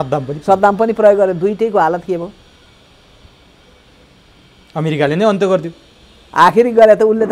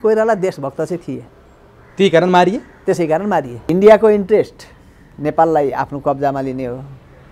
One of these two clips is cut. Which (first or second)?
second